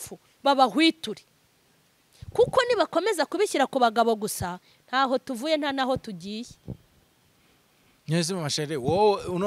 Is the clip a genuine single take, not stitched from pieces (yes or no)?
yes